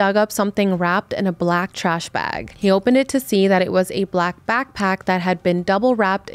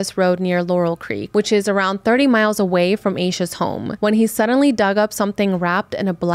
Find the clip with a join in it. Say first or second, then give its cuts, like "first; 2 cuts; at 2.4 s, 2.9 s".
second; 2 cuts; at 1.2 s, 3.9 s